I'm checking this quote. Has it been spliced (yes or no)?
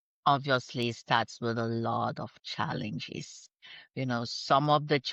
no